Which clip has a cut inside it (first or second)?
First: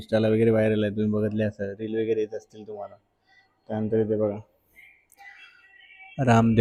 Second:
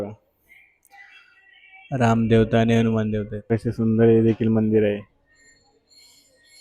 second